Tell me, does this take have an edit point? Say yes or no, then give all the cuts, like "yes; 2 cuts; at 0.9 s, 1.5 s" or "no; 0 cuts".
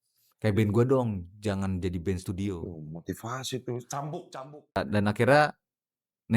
yes; 1 cut; at 4.8 s